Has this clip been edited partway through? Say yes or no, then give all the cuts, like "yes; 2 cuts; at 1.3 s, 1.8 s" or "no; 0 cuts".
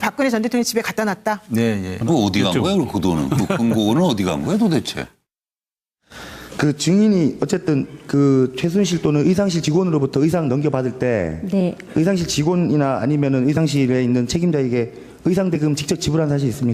no; 0 cuts